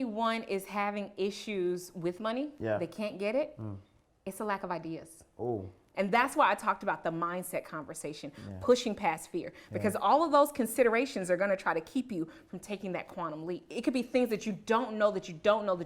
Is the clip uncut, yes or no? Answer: no